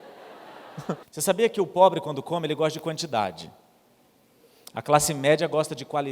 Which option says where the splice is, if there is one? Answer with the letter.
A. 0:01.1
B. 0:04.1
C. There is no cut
A